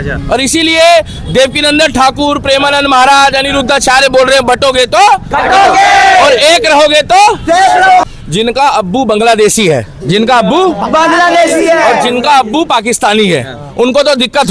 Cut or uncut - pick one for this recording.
cut